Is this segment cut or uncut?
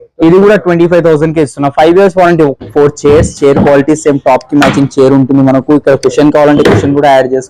cut